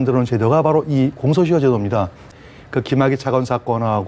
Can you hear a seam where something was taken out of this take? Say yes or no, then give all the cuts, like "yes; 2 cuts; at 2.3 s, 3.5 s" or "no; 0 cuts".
yes; 1 cut; at 2.3 s